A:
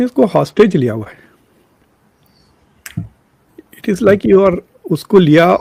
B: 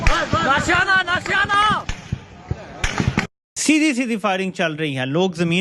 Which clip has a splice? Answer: B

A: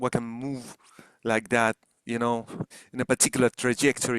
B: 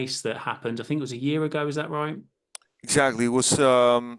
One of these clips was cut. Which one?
A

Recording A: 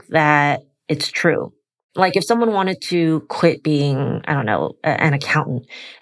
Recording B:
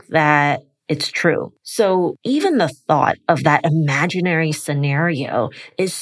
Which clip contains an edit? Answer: B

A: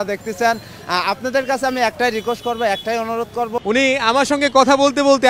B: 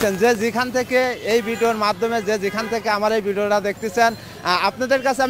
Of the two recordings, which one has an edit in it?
A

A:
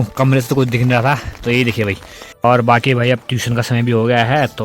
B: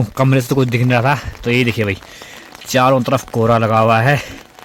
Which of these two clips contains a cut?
A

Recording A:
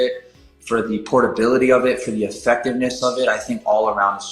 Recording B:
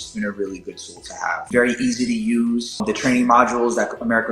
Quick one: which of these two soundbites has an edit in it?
B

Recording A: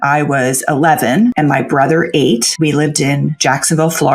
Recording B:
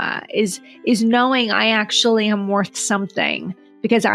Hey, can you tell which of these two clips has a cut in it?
A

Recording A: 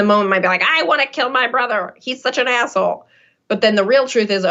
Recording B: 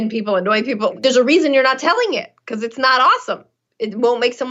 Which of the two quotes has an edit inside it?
B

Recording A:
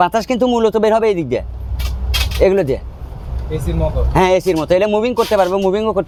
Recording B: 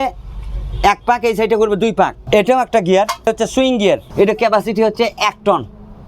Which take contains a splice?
B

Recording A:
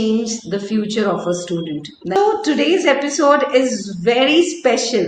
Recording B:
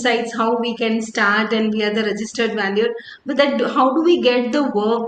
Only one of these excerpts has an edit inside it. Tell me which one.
A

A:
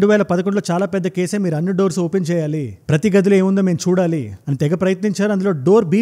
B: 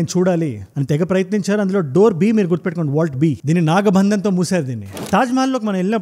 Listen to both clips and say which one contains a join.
B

